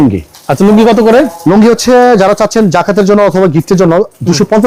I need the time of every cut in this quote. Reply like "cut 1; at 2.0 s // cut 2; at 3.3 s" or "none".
none